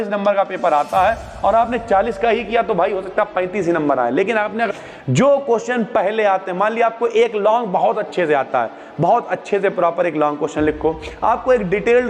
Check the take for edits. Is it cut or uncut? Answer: cut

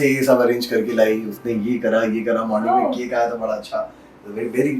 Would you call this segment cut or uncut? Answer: uncut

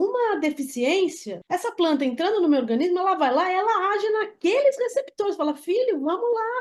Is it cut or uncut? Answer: cut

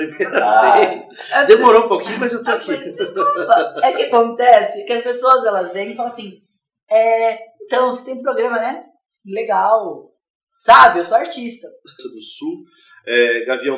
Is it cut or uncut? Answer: uncut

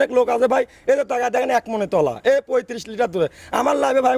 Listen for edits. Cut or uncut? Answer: uncut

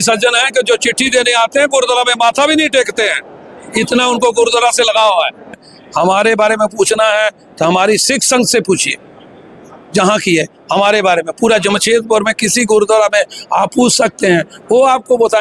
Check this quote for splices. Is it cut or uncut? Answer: cut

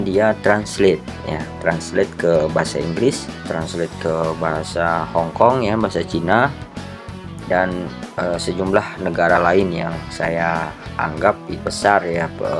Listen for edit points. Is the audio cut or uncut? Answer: cut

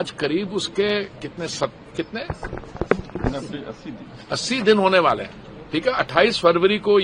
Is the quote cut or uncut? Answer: uncut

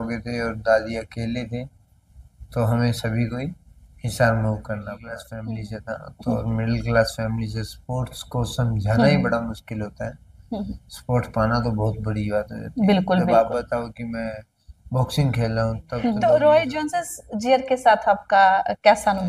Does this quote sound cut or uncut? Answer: cut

